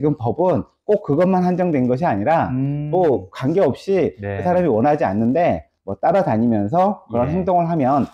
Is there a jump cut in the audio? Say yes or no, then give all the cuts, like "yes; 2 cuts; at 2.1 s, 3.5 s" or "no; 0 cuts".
no; 0 cuts